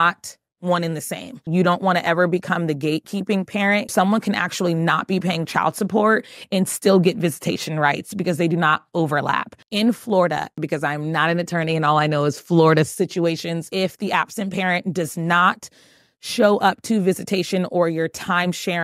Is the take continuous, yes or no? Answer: no